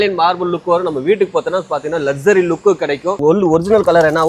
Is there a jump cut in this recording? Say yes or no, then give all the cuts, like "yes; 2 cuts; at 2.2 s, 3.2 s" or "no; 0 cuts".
yes; 1 cut; at 3.2 s